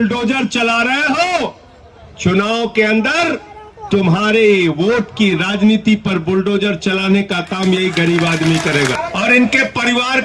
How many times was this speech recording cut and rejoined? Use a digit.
1